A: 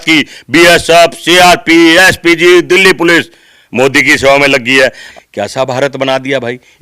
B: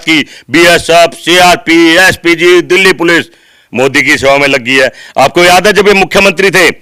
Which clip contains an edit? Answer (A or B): A